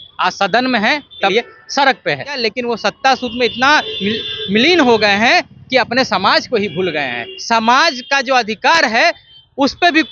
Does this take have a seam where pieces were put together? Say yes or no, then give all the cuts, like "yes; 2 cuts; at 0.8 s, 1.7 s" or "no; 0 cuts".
yes; 3 cuts; at 1.3 s, 2.4 s, 7.3 s